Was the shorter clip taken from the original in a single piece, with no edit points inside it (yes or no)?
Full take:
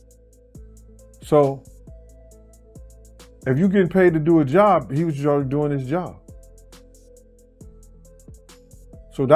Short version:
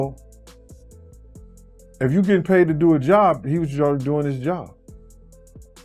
no